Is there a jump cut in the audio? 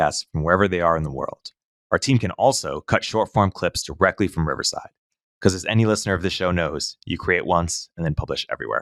no; 0 cuts

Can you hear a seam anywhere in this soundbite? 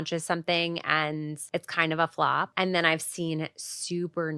yes; 2 cuts; at 1.4 s, 2.5 s

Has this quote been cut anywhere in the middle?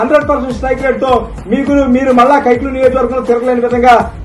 no; 0 cuts

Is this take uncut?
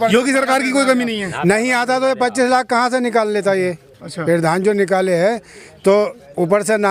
yes; 0 cuts

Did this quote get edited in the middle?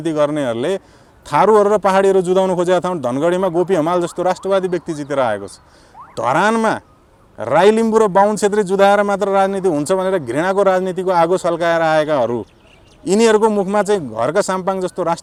no; 0 cuts

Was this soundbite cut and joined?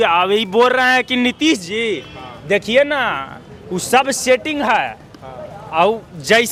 no; 0 cuts

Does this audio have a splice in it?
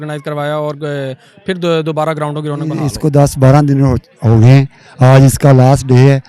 yes; 1 cut; at 2.9 s

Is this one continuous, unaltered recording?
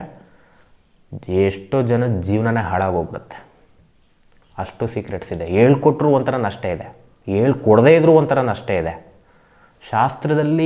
yes; 0 cuts

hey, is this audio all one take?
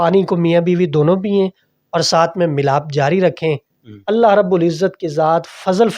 yes; 0 cuts

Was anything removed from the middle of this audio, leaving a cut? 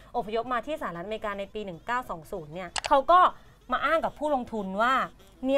no; 0 cuts

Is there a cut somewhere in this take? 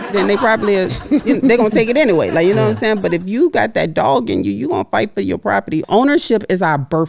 yes; 1 cut; at 5.8 s

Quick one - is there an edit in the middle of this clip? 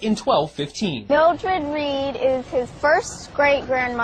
no; 0 cuts

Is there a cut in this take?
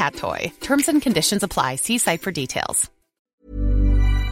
yes; 1 cut; at 3.2 s

